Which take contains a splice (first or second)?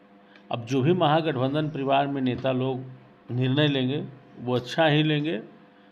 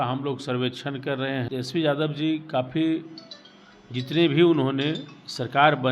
second